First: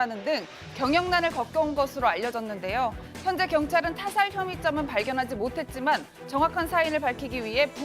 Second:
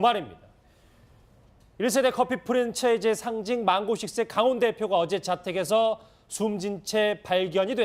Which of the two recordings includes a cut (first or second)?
first